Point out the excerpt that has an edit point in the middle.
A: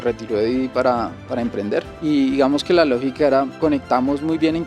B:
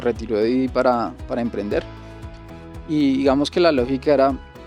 A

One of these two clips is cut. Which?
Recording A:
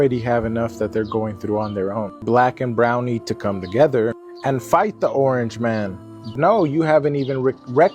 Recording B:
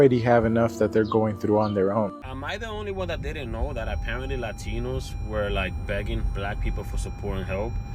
B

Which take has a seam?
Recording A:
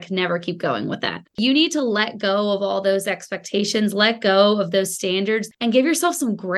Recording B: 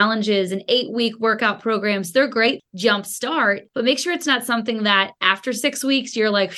A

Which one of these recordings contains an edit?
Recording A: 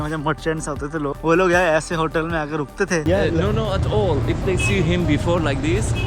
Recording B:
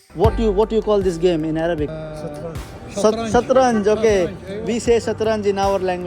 A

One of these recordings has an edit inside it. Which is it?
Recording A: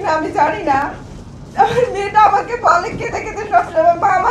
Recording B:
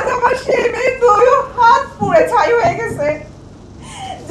A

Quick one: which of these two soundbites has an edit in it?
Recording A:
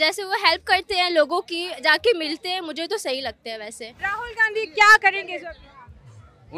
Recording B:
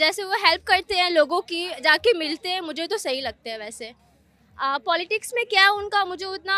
A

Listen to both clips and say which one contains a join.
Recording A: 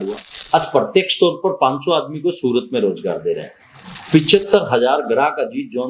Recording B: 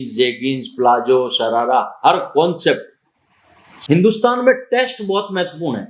B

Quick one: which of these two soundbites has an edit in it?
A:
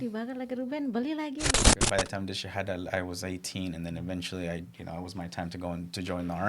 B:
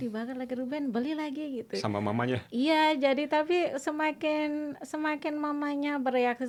A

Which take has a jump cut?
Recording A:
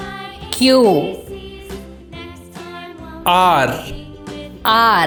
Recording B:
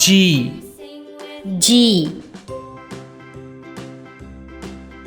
B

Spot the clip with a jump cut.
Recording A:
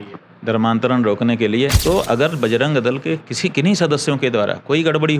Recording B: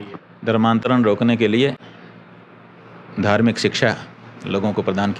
A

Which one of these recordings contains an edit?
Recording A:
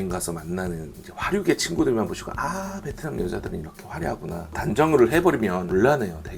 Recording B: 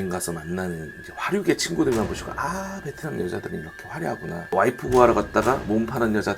B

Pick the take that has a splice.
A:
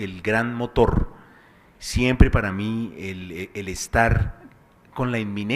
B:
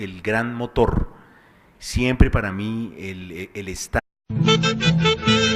A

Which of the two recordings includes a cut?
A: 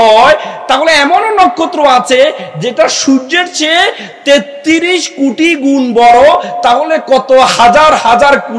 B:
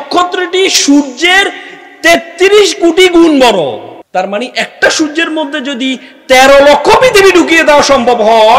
B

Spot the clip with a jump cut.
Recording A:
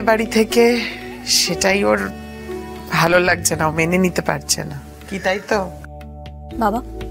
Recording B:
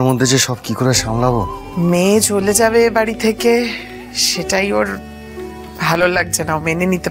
B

